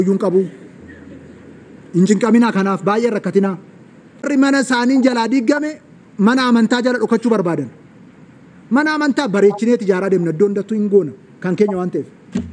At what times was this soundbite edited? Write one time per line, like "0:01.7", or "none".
0:04.2